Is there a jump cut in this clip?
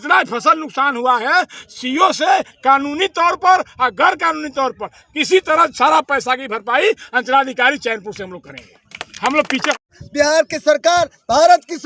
yes; 1 cut; at 10.0 s

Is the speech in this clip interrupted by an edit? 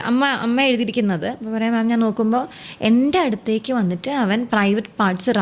no; 0 cuts

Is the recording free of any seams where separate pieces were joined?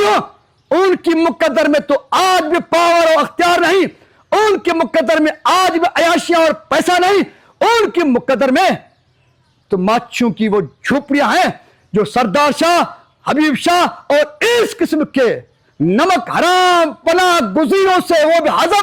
yes; 0 cuts

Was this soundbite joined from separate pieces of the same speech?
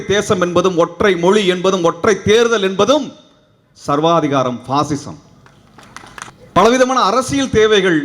yes; 1 cut; at 6.3 s

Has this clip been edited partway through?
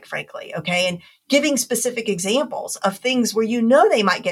no; 0 cuts

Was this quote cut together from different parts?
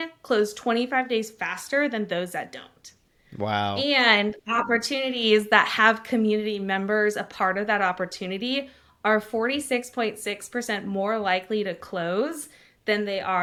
no; 0 cuts

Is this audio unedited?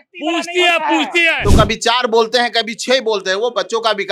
no; 1 cut; at 1.4 s

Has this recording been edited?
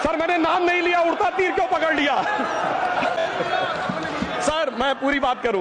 no; 0 cuts

